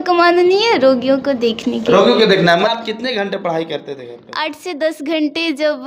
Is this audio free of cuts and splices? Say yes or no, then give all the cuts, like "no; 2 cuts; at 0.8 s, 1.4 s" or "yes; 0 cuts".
no; 1 cut; at 2.7 s